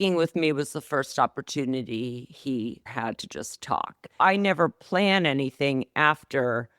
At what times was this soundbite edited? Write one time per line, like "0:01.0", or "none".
0:02.9
0:04.2